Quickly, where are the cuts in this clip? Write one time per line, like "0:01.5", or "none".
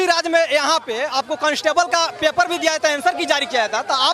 none